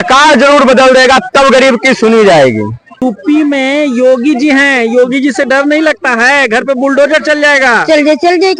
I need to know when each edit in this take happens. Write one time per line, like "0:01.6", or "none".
0:03.0